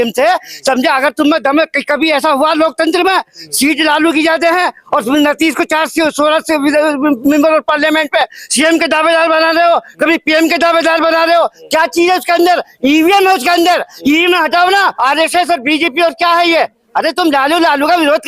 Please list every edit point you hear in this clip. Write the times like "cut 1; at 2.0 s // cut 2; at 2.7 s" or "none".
cut 1; at 14.9 s